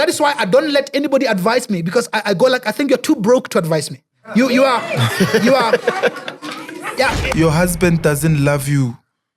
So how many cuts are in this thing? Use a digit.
1